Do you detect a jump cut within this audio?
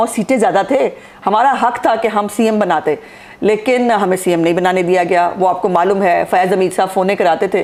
no; 0 cuts

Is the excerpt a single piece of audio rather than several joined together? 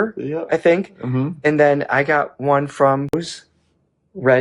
no; 1 cut; at 3.1 s

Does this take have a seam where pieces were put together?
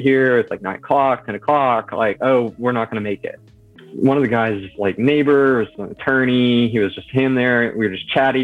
yes; 1 cut; at 3.8 s

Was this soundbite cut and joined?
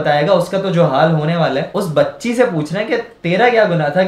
yes; 1 cut; at 1.7 s

